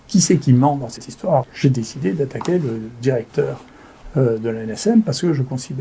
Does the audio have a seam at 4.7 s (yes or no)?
no